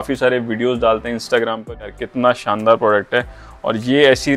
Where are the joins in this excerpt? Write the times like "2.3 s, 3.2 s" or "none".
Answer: 2.0 s